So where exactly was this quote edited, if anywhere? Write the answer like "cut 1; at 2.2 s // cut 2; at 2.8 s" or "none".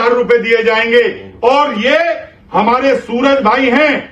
none